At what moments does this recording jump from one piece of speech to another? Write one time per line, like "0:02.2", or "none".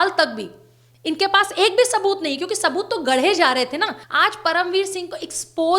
0:04.0